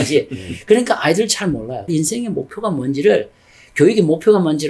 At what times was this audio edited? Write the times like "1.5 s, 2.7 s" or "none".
1.8 s

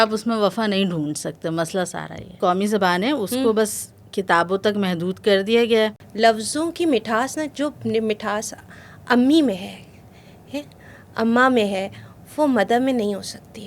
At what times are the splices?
2.4 s, 6.0 s

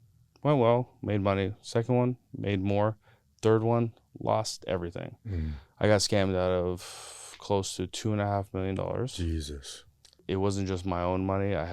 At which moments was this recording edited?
10.2 s

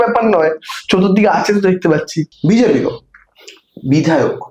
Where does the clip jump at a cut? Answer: 2.2 s

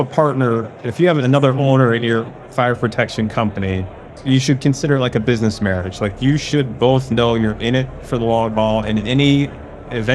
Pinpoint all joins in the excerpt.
1.2 s, 4.2 s

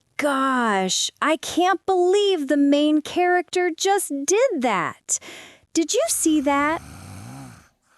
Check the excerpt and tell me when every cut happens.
6.8 s

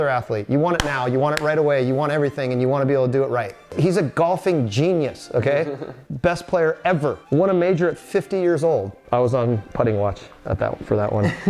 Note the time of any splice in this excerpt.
3.6 s, 6.0 s

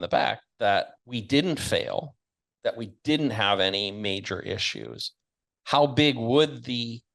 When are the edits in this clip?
0.9 s

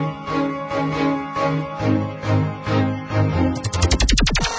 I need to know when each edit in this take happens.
3.7 s

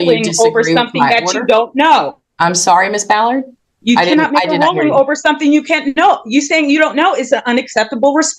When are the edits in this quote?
none

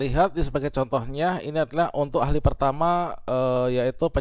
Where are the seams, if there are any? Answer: none

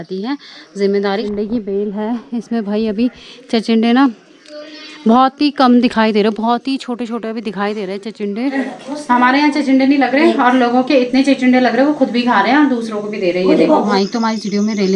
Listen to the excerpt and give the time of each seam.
1.2 s, 8.6 s, 13.9 s

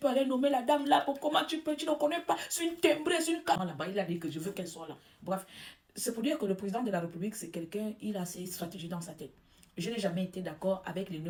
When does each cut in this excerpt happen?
none

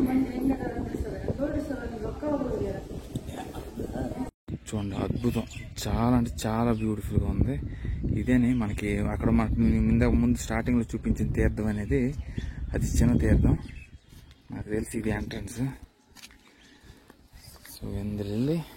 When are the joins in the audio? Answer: 4.4 s

